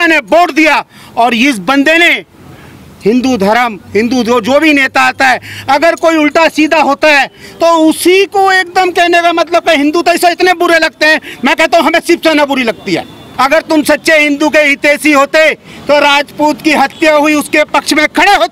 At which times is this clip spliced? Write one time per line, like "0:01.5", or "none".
0:13.1